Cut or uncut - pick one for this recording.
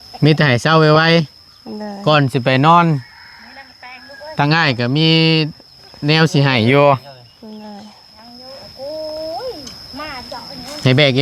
uncut